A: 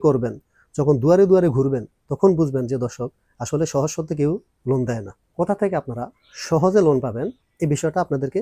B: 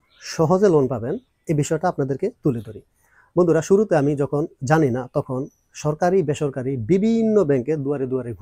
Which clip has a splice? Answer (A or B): A